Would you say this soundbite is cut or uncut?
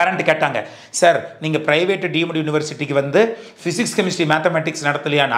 uncut